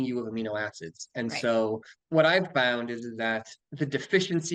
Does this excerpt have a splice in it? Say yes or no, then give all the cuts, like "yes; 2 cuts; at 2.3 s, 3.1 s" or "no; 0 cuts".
yes; 2 cuts; at 1.9 s, 3.6 s